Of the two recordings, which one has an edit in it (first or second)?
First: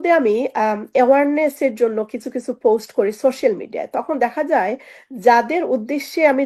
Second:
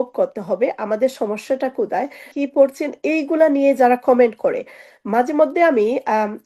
second